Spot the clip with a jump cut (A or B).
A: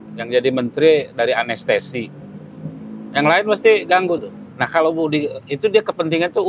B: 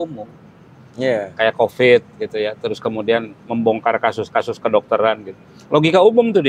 A